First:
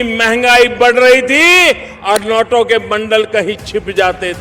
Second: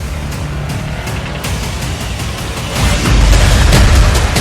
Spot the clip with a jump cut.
second; 1 cut; at 3.3 s

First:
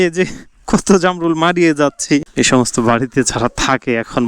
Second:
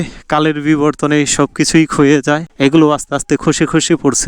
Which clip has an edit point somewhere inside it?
first; 1 cut; at 2.3 s

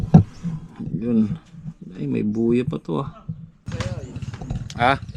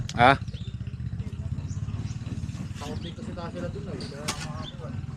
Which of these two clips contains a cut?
first; 1 cut; at 3.7 s

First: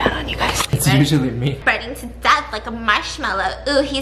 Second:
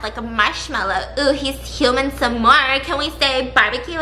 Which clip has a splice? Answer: first; 1 cut; at 1.6 s

